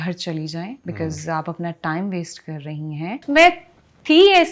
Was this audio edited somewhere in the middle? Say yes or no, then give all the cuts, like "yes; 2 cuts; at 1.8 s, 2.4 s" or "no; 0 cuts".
yes; 1 cut; at 3.2 s